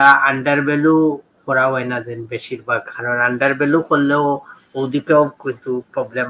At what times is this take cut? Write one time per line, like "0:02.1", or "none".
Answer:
none

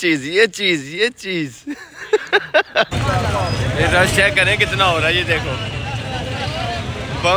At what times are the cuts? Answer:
0:02.9

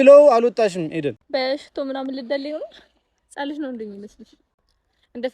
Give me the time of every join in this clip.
0:01.2

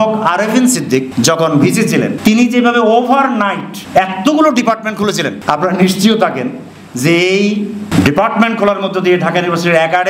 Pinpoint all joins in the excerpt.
0:01.1
0:02.1
0:03.7
0:05.4
0:07.9

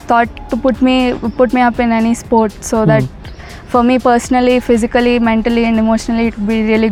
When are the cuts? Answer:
none

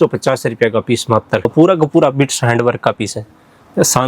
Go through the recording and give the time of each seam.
0:01.5

